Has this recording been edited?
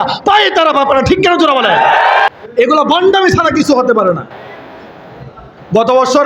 yes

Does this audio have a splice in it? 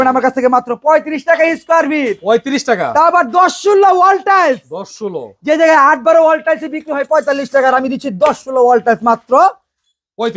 no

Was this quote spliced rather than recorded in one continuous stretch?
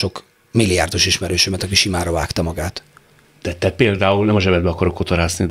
no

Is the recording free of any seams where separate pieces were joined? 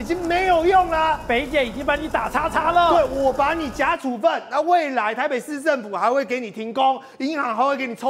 yes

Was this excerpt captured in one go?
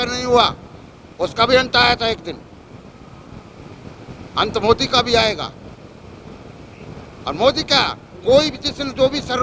yes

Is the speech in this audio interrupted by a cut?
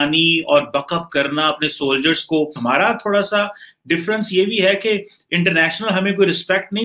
yes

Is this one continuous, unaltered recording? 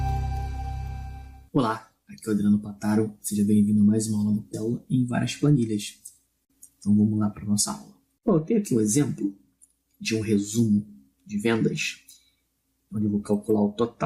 yes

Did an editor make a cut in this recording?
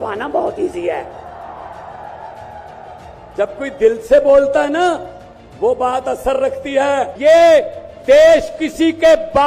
yes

